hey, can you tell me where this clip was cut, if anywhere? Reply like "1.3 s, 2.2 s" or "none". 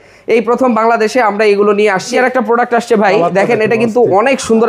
2.1 s